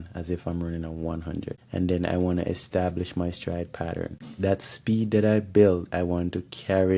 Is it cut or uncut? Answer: cut